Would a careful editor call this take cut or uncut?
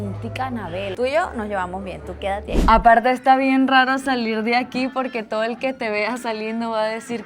cut